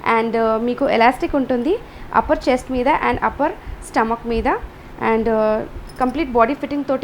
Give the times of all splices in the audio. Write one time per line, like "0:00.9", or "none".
none